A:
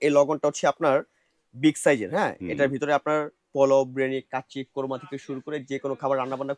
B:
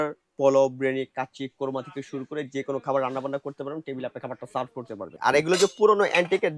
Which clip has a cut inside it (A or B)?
B